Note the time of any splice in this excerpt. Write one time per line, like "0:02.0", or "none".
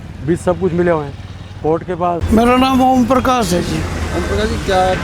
0:02.2